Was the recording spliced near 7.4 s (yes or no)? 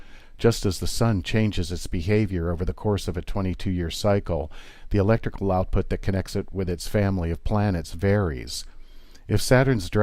no